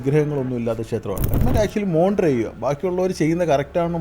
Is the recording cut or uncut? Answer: cut